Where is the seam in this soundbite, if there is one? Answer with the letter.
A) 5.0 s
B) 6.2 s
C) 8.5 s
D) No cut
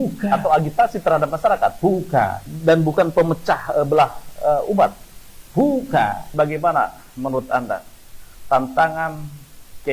B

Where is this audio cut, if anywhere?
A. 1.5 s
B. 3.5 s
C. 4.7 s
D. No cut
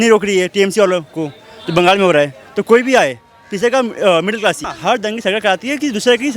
C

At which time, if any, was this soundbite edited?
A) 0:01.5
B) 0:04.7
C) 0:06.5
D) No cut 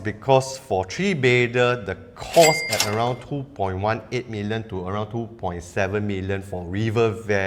D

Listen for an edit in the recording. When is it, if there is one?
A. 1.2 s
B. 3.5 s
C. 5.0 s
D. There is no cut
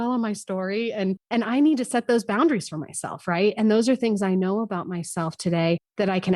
A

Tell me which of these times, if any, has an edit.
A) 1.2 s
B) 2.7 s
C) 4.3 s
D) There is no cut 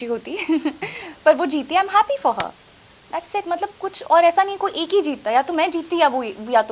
D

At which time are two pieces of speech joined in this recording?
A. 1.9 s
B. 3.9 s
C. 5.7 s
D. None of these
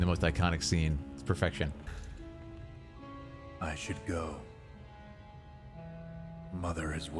A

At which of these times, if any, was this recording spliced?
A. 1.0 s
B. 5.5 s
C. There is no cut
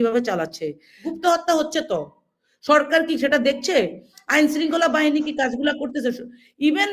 A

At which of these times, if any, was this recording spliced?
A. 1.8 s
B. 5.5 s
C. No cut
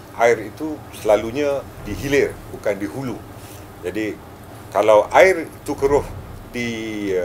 A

